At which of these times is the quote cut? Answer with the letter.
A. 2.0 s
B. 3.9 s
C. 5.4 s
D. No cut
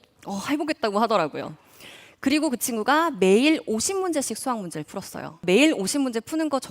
C